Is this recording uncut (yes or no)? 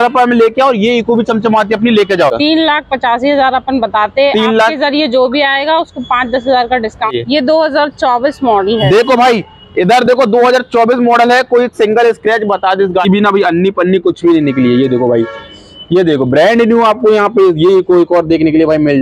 no